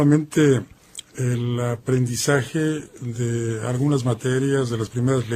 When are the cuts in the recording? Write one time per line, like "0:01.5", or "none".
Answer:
0:03.5